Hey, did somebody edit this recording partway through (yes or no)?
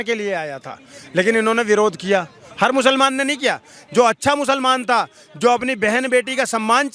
no